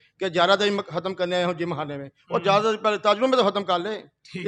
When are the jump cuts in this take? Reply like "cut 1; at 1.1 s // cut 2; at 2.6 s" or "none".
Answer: none